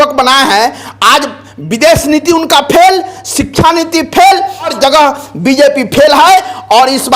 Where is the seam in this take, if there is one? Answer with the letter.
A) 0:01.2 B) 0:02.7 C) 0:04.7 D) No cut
C